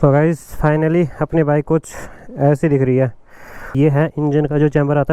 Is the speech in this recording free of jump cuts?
no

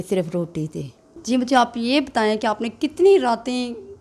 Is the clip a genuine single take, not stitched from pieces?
no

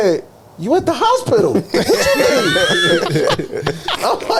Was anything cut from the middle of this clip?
no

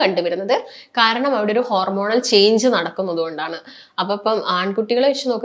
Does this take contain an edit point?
no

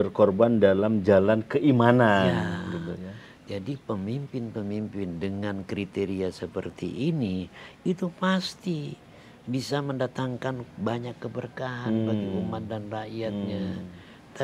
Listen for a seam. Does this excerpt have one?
no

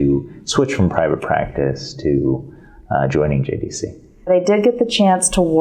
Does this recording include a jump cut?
yes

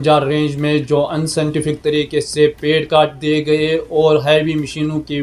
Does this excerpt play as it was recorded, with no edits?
yes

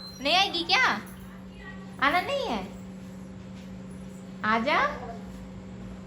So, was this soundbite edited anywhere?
no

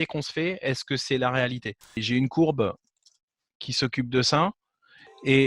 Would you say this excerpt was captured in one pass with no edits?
no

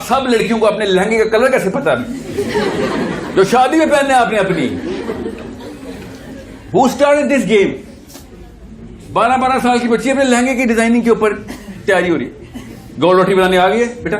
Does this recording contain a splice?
no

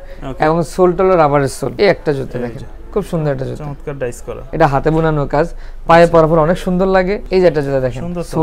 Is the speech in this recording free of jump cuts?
no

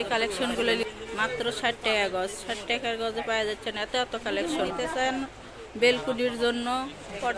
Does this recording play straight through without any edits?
no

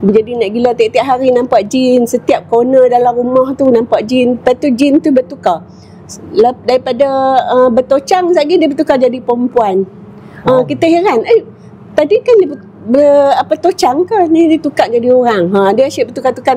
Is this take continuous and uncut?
yes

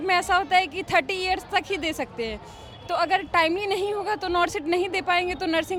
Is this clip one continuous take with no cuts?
yes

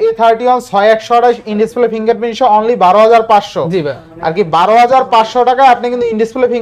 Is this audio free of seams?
yes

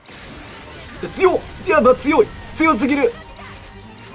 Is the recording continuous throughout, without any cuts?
yes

